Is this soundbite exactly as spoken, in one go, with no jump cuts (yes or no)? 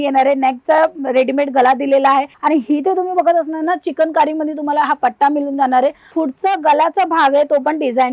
no